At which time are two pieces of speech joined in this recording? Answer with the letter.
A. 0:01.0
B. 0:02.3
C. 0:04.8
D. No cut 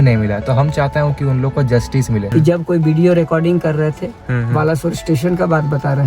B